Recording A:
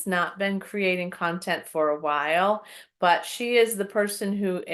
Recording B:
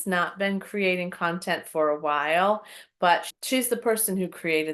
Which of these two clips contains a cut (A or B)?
B